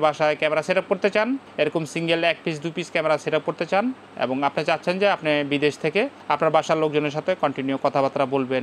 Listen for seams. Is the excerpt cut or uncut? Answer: uncut